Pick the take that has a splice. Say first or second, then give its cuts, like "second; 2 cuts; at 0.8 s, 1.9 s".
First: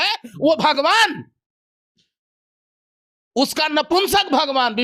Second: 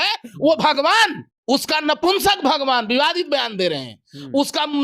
second; 1 cut; at 1.3 s